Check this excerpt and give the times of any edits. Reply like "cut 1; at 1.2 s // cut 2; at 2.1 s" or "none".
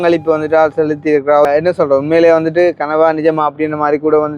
cut 1; at 1.5 s